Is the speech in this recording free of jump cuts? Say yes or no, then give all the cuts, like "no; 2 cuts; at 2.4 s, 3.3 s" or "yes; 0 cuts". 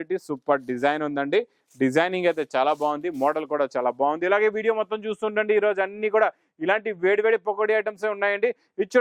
yes; 0 cuts